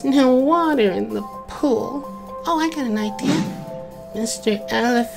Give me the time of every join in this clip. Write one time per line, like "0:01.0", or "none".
0:03.5